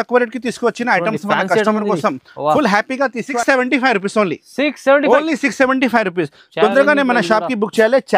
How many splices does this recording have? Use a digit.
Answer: 1